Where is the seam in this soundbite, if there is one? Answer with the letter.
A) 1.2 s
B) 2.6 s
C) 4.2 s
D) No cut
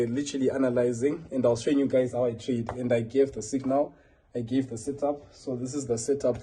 D